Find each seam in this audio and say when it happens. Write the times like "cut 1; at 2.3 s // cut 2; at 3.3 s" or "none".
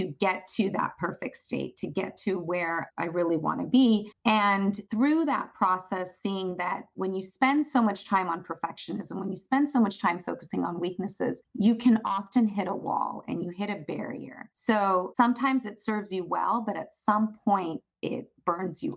cut 1; at 15.1 s